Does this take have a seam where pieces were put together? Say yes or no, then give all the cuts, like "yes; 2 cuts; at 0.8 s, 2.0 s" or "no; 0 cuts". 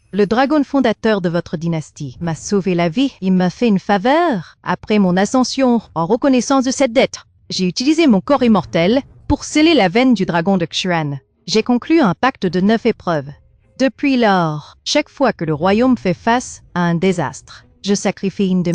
no; 0 cuts